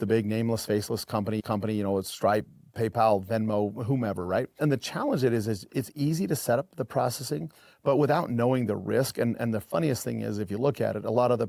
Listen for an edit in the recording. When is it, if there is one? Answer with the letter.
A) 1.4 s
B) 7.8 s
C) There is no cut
C